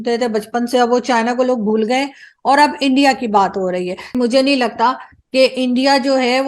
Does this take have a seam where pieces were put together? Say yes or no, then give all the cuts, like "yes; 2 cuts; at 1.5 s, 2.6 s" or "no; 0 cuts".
yes; 1 cut; at 4.1 s